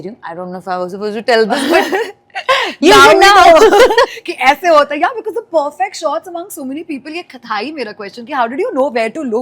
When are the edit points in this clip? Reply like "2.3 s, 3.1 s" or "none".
none